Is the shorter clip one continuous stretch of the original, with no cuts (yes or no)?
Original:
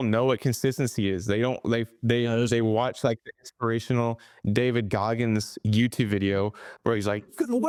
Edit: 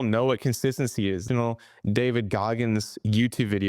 no